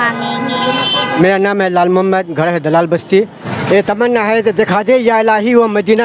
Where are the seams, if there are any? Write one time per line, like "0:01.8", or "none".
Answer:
0:01.2
0:03.4